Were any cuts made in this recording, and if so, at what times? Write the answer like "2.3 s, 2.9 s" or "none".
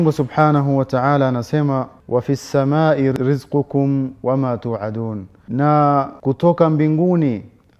1.9 s, 3.1 s, 5.3 s, 6.1 s